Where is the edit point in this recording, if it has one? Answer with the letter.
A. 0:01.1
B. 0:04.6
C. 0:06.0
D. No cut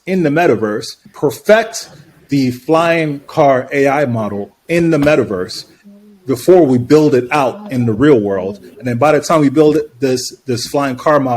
A